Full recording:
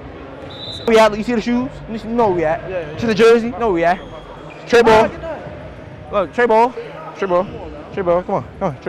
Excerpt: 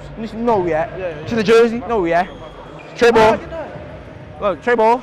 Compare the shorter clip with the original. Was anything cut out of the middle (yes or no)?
no